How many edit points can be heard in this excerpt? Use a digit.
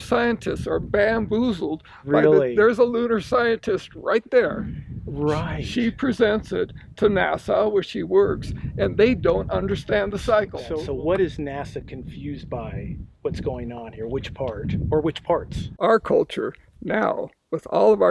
2